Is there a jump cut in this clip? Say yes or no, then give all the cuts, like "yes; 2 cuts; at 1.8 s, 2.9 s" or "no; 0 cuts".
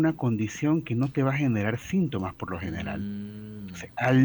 no; 0 cuts